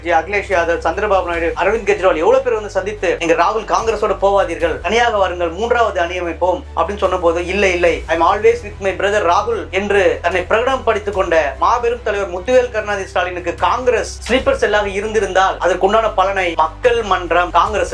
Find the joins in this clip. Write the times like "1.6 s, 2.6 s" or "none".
none